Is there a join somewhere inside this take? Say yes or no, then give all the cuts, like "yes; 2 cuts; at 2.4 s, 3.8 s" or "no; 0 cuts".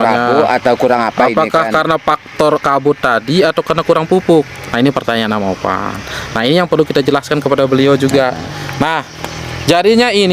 no; 0 cuts